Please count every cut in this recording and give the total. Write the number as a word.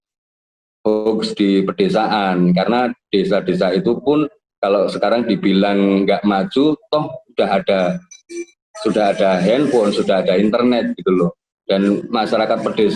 two